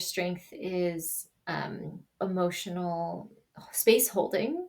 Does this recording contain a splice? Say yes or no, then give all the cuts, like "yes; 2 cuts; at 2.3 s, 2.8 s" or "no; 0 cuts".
no; 0 cuts